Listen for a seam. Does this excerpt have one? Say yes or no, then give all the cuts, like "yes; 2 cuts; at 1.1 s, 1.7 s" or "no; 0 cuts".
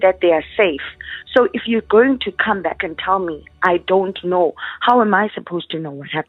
no; 0 cuts